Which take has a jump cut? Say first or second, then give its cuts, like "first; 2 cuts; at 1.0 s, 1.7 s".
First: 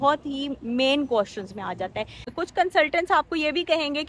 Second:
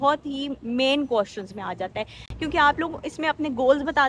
first; 1 cut; at 2.3 s